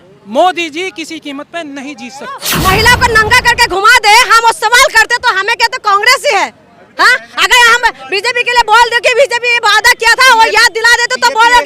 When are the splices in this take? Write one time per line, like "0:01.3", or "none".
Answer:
0:02.5